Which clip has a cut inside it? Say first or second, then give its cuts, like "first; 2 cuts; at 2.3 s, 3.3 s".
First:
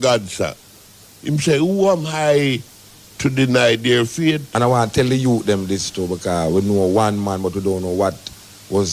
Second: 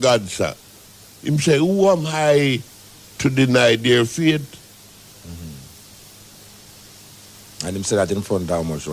first; 1 cut; at 4.4 s